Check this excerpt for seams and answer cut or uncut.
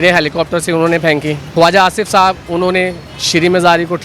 cut